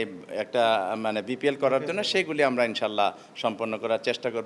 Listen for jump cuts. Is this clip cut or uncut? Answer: uncut